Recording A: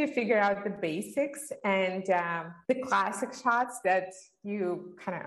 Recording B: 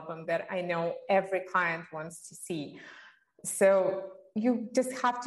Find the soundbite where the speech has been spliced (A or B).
A